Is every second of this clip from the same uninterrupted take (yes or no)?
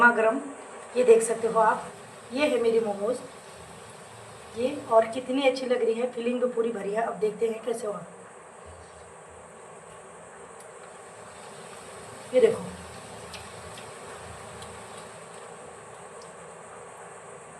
yes